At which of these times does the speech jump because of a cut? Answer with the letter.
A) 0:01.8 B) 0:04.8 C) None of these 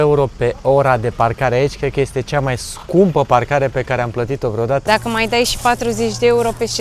B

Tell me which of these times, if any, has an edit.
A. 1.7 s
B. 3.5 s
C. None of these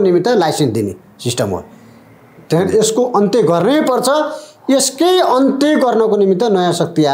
C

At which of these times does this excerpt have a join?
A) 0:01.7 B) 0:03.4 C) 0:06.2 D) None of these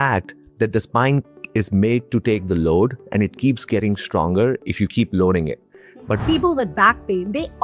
C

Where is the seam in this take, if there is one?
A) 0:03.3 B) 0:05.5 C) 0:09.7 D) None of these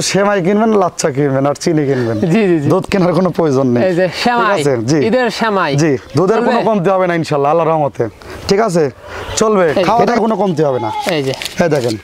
C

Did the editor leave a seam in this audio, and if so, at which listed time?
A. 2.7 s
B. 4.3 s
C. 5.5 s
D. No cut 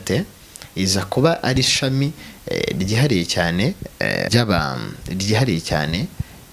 B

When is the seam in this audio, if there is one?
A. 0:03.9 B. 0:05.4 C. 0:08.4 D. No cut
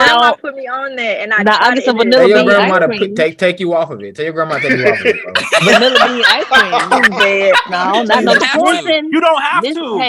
C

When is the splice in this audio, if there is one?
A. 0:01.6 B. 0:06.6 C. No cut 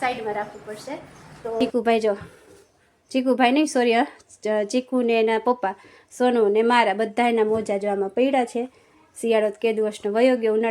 A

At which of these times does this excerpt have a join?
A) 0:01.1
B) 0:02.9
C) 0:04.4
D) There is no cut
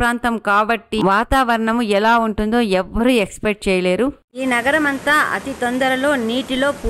C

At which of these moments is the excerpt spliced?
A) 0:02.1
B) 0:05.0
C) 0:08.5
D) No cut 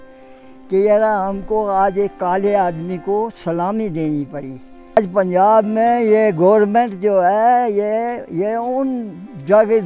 B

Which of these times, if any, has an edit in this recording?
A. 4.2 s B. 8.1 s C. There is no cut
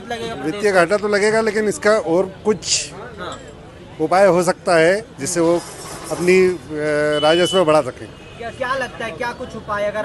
C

